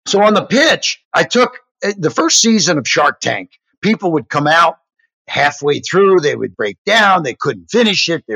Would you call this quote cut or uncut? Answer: cut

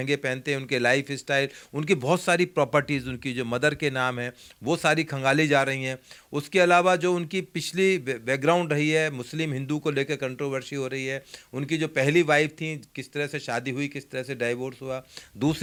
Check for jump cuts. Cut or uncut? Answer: uncut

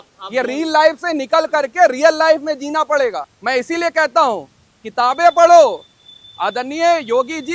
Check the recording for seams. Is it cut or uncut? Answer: cut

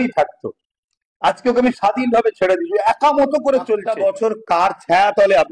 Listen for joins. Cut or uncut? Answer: cut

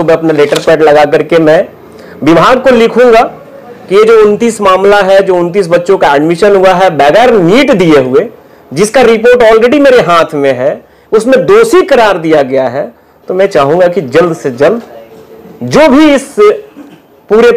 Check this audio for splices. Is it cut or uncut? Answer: uncut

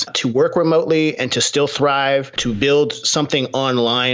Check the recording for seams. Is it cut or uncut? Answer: uncut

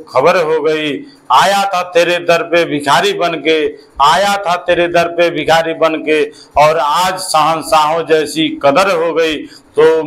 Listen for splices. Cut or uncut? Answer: uncut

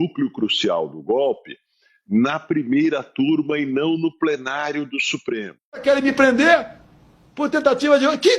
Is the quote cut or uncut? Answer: cut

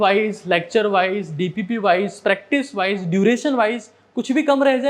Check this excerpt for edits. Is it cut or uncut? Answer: uncut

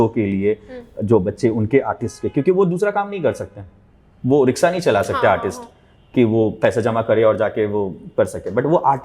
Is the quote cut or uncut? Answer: uncut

